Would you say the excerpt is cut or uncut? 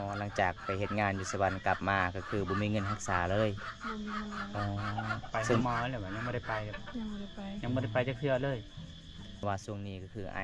cut